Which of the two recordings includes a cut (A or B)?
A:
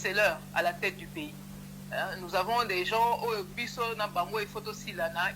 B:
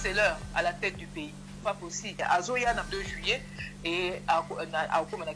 B